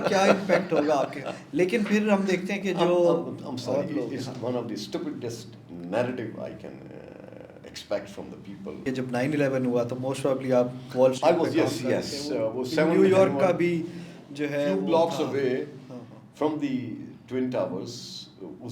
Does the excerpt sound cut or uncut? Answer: cut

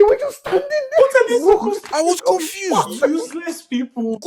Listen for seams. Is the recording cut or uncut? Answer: uncut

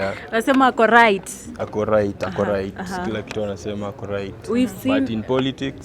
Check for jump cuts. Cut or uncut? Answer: uncut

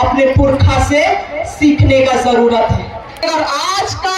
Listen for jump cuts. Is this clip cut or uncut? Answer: cut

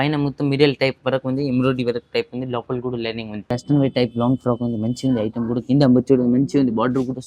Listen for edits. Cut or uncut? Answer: cut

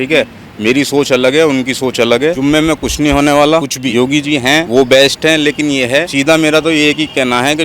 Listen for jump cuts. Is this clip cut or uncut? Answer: cut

